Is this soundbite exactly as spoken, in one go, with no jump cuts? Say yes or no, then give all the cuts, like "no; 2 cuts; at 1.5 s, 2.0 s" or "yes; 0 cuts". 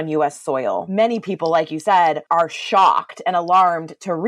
no; 2 cuts; at 0.9 s, 2.2 s